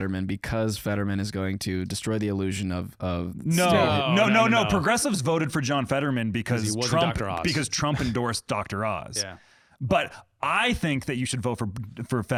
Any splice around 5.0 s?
no; 0 cuts

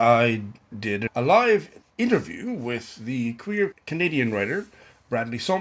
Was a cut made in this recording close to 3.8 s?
yes; 3 cuts; at 1.1 s, 1.8 s, 3.8 s

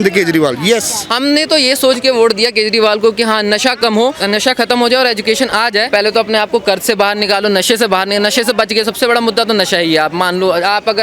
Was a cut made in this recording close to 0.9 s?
yes; 3 cuts; at 0.9 s, 4.2 s, 5.9 s

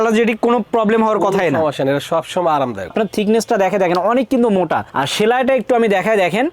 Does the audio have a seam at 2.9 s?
yes; 1 cut; at 2.9 s

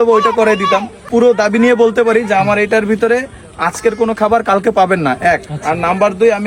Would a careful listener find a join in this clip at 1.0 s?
yes; 1 cut; at 1.0 s

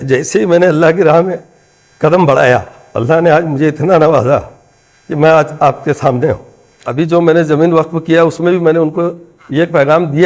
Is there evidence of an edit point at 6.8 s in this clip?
yes; 1 cut; at 6.8 s

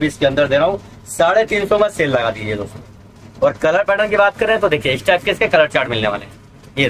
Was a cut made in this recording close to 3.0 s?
no; 0 cuts

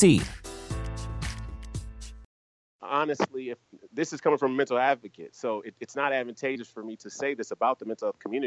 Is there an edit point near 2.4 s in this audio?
yes; 1 cut; at 2.4 s

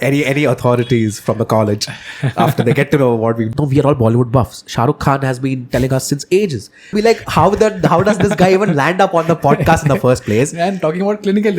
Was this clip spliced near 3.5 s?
yes; 2 cuts; at 3.5 s, 6.9 s

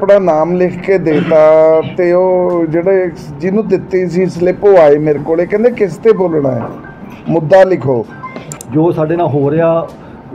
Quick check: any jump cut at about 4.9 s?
no; 1 cut; at 8.6 s

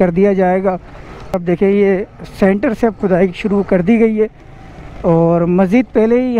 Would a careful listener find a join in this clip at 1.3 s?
yes; 1 cut; at 1.3 s

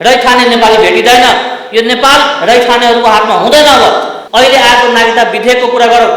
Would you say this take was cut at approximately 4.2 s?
yes; 1 cut; at 4.2 s

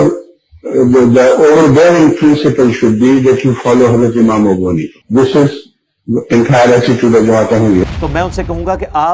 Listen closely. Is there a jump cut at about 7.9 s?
yes; 1 cut; at 7.9 s

